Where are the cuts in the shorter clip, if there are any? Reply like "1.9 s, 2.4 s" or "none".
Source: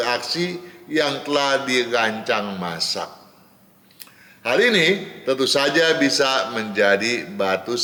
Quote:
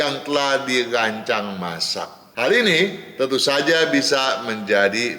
2.2 s